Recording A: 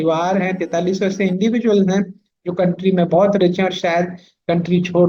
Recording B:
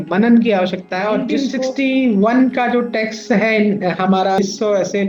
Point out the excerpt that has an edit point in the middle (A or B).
B